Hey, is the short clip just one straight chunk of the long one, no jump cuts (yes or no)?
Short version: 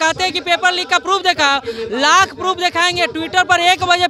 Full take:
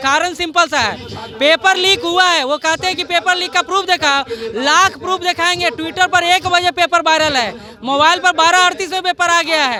yes